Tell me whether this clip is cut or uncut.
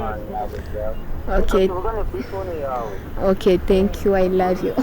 uncut